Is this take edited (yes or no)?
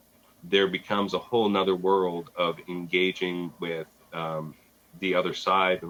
no